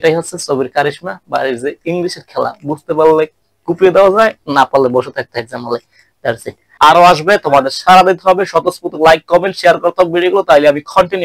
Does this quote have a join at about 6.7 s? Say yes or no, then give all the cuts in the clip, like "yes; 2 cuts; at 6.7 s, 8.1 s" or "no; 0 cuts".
yes; 1 cut; at 6.7 s